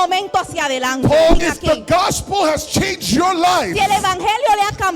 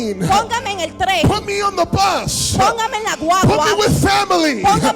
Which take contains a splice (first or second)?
first